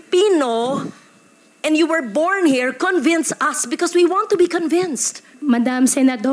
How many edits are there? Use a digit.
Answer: 1